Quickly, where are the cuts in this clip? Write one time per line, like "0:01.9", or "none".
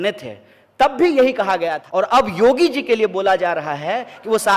0:01.8